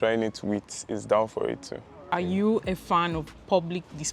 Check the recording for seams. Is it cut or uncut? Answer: cut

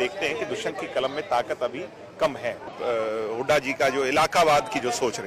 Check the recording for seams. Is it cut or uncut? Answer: cut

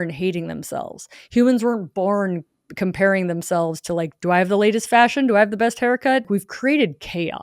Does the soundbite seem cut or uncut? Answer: cut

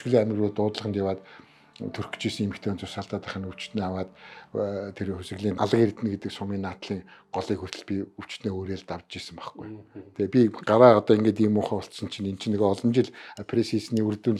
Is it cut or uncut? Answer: uncut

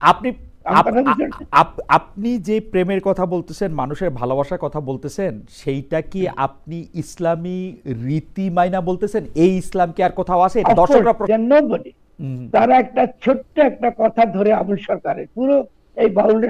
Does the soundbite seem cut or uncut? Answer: cut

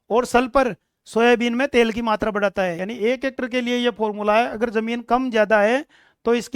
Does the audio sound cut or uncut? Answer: cut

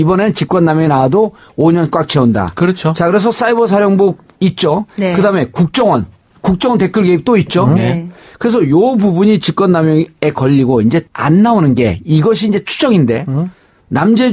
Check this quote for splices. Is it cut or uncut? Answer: cut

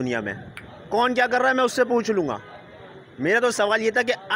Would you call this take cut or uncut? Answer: uncut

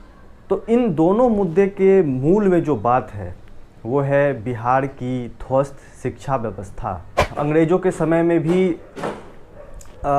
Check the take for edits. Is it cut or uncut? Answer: cut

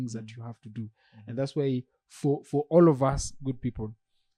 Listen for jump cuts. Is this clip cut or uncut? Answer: uncut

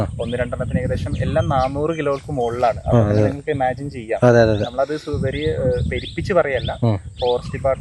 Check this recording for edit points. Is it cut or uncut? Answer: uncut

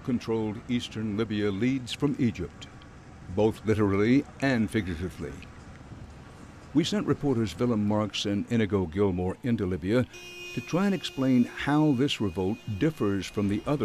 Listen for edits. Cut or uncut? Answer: uncut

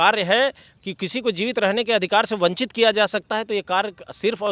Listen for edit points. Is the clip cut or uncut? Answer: uncut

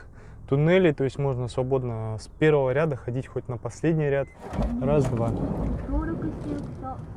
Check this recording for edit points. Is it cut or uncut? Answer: cut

